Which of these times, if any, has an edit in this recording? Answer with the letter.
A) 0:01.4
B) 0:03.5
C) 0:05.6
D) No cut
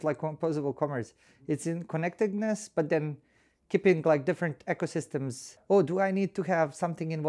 C